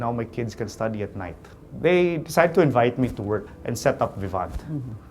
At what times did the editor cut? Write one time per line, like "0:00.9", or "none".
0:01.5
0:03.6